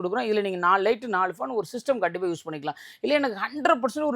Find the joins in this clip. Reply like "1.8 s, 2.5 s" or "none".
none